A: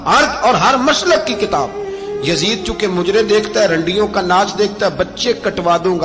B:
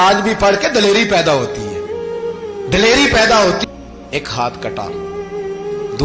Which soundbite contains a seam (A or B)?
B